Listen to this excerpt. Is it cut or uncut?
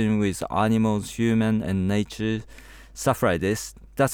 uncut